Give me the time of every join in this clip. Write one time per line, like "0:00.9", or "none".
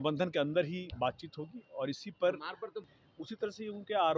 0:02.8